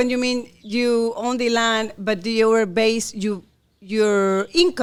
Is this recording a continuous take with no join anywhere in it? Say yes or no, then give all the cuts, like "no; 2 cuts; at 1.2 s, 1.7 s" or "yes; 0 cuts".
yes; 0 cuts